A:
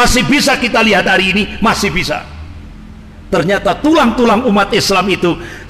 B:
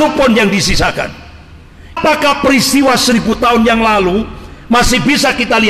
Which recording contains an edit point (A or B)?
B